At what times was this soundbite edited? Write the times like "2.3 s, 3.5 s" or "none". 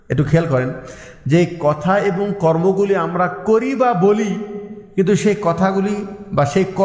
none